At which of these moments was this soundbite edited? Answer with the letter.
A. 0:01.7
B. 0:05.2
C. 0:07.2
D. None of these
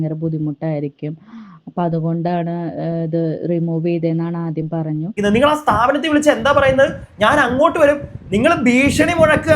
B